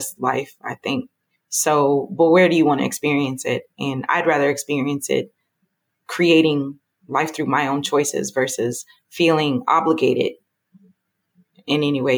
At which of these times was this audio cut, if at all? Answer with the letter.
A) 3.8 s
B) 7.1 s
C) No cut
C